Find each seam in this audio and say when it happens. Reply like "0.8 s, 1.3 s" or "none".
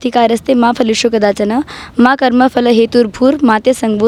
none